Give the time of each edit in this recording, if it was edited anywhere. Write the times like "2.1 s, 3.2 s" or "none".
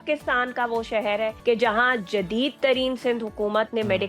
1.4 s

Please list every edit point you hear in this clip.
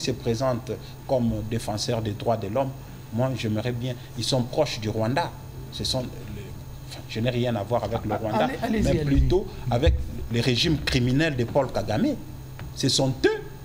none

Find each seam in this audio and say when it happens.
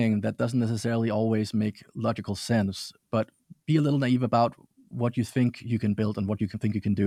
none

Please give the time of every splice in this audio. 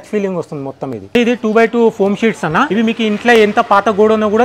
1.1 s, 2.7 s

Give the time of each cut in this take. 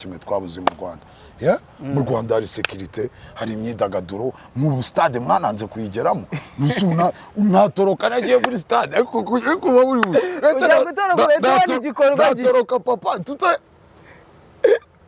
none

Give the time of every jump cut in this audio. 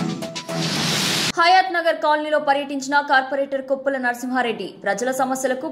1.3 s

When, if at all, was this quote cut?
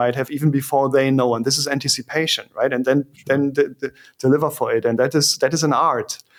none

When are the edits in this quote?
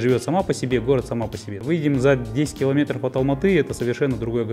1.6 s

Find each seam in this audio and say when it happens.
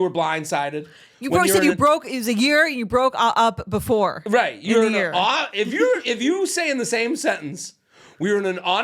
none

